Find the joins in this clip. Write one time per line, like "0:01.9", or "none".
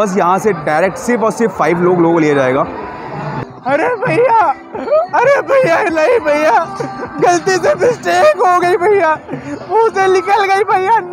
0:03.3